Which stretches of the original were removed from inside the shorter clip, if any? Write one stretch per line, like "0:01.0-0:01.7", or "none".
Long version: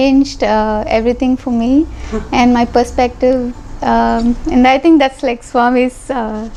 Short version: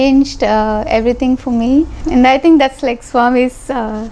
0:02.0-0:04.4